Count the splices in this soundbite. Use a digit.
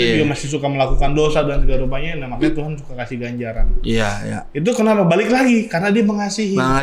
0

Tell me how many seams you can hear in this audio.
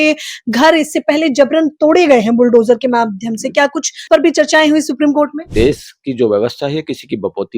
2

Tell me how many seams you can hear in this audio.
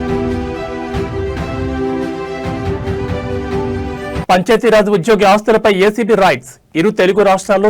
1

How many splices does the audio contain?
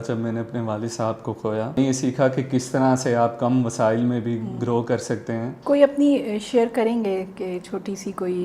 2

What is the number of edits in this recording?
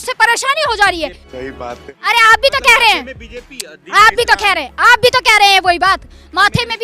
1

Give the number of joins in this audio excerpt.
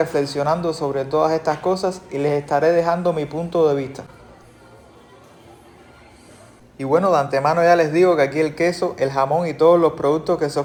0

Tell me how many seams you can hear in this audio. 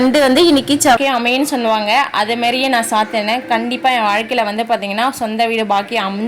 1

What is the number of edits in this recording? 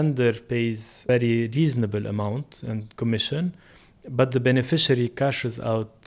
1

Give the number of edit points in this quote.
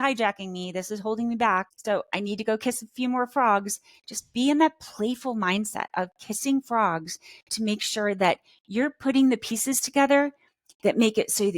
1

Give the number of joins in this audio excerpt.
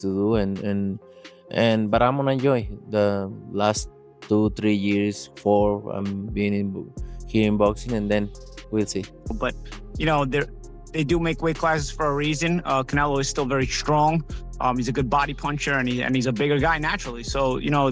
1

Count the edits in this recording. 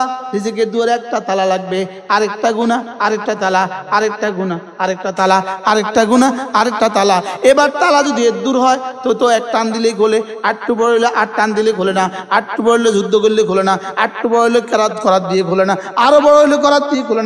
0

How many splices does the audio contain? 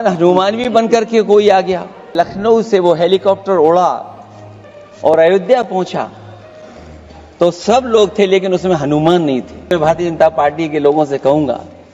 2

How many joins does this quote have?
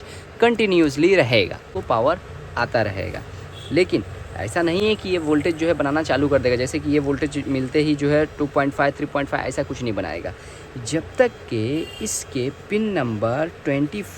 1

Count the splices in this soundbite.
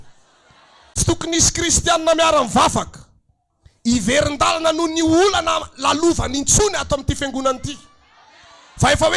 1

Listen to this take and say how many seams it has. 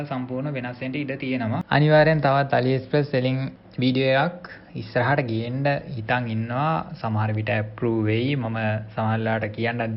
1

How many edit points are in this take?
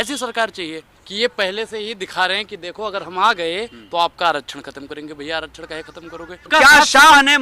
2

